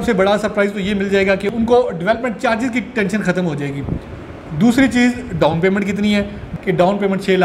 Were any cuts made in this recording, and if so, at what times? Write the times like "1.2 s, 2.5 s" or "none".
6.5 s